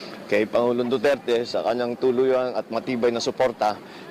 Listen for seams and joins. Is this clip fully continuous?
no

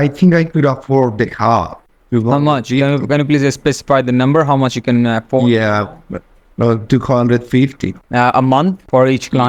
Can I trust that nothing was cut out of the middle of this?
yes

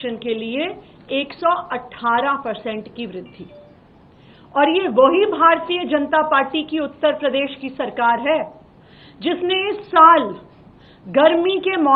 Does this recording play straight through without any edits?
yes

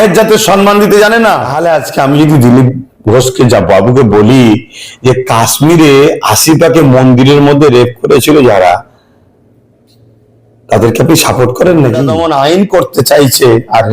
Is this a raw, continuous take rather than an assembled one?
no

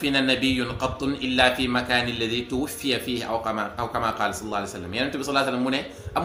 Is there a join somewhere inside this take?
no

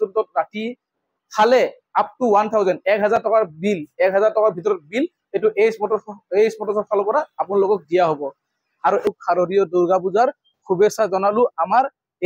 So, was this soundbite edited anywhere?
yes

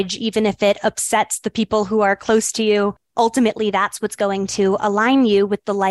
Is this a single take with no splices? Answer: no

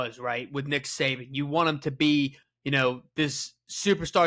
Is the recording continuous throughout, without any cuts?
no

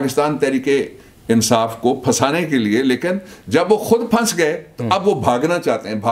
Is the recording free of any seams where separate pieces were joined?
yes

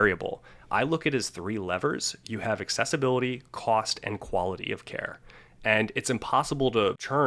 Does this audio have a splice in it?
no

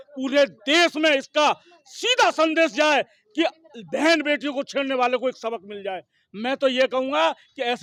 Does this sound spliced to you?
no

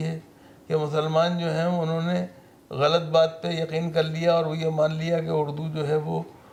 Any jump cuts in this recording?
no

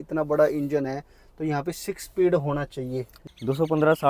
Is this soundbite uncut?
no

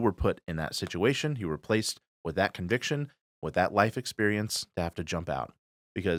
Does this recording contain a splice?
no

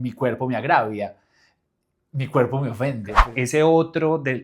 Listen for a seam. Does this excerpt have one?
yes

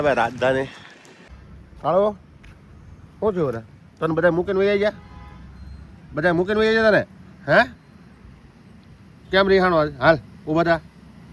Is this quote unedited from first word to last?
no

